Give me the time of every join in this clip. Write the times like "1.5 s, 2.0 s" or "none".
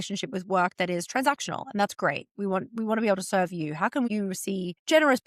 4.2 s